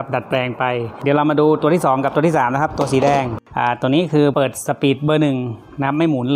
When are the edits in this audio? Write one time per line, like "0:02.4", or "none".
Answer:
0:00.9
0:03.4
0:04.3